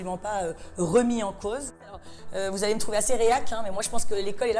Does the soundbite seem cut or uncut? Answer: cut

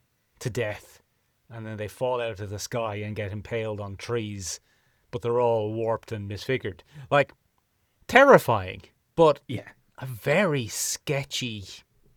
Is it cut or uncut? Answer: uncut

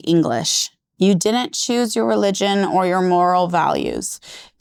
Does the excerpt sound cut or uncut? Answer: uncut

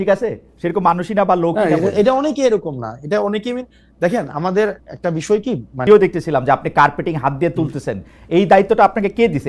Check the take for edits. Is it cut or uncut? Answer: cut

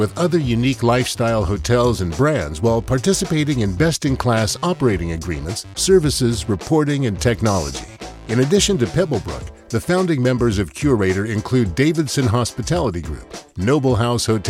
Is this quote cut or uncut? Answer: uncut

